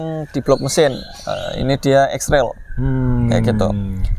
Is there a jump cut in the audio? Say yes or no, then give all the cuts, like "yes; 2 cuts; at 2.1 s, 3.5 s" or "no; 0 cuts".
no; 0 cuts